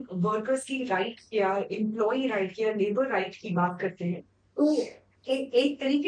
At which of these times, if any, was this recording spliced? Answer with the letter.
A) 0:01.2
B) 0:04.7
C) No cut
C